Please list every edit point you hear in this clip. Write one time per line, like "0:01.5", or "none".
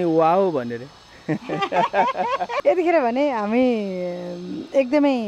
none